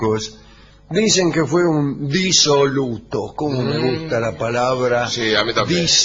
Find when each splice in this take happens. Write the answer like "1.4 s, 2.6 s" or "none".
2.5 s